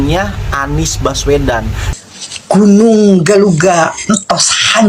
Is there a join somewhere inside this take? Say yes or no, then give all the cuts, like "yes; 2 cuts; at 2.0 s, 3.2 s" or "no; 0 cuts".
yes; 1 cut; at 1.8 s